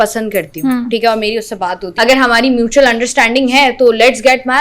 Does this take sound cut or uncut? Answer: cut